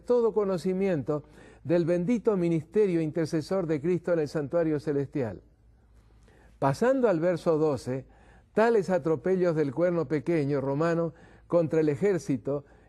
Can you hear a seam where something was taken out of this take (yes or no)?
no